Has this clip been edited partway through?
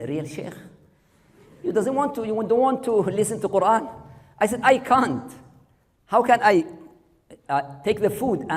no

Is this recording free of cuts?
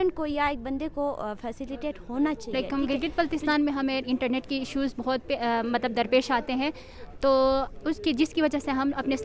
no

